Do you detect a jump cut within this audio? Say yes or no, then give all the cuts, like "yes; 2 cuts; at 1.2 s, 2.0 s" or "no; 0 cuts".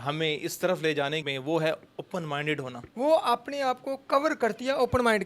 yes; 2 cuts; at 1.3 s, 2.8 s